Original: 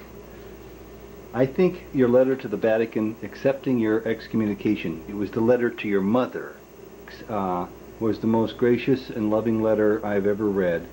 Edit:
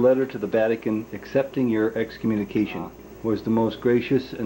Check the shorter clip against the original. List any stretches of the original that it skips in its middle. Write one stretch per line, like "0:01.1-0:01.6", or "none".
0:05.0-0:07.7